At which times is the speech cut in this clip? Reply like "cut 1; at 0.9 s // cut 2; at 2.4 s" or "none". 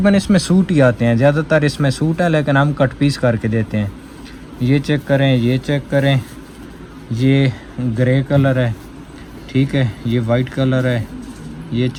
none

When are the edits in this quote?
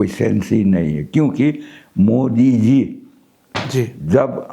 none

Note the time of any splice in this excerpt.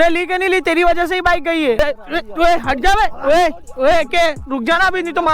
cut 1; at 1.8 s

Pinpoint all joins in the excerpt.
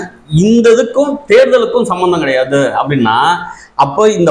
none

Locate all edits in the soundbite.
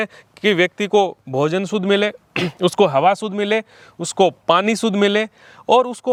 none

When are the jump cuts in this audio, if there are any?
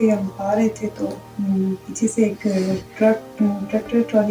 cut 1; at 1.2 s // cut 2; at 2.9 s

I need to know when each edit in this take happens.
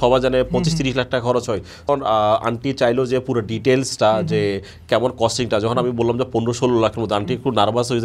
cut 1; at 1.9 s

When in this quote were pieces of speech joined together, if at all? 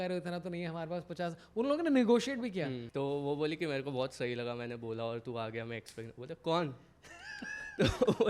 cut 1; at 2.8 s

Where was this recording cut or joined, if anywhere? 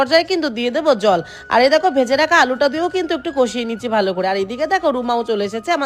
none

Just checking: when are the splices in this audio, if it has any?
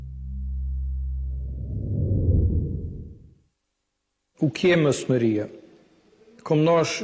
cut 1; at 1.8 s

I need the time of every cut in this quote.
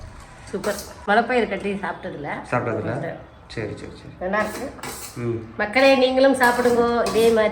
cut 1; at 0.9 s

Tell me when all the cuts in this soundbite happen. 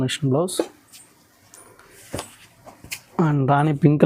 none

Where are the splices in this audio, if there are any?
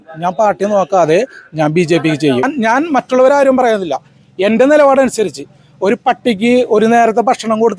cut 1; at 2.4 s

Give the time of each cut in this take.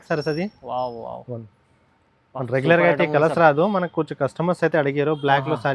none

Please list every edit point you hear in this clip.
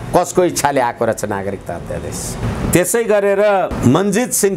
none

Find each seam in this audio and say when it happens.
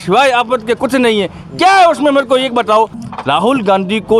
cut 1; at 3.0 s

